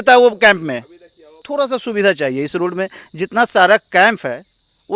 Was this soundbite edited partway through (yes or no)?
yes